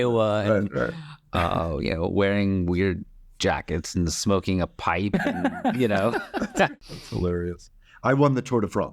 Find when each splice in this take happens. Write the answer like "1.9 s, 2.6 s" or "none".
6.8 s